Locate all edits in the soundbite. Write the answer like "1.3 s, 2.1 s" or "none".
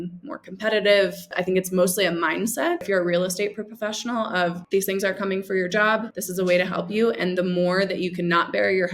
1.3 s, 2.8 s, 4.6 s, 6.2 s